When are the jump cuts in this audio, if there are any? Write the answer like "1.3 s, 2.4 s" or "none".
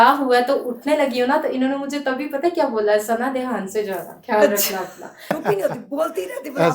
5.4 s